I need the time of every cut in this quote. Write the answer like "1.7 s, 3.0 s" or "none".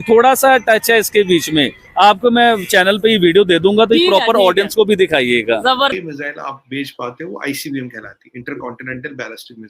5.9 s